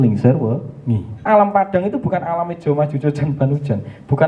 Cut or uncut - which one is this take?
cut